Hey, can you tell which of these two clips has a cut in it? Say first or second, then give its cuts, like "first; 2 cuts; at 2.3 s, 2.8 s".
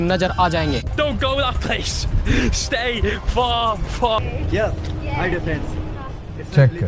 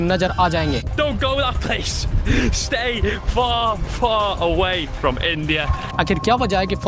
first; 1 cut; at 4.2 s